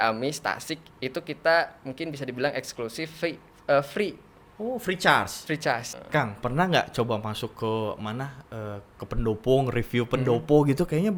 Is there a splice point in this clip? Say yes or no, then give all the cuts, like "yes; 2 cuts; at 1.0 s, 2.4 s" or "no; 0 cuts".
yes; 1 cut; at 5.9 s